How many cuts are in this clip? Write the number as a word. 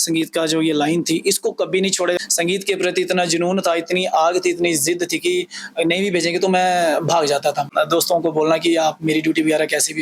two